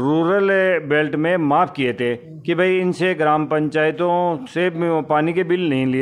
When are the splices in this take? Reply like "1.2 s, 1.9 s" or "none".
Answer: none